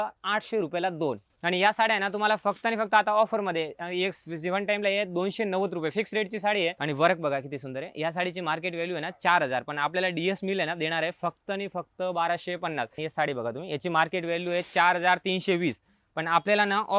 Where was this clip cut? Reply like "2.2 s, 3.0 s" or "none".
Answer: 1.3 s, 6.8 s, 12.9 s